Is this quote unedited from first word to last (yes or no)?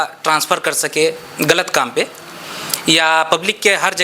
yes